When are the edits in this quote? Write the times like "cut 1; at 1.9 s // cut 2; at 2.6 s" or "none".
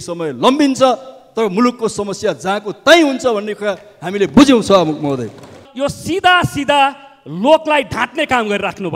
cut 1; at 5.6 s